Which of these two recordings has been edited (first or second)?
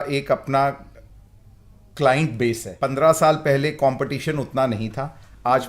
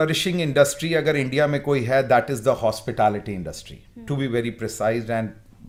first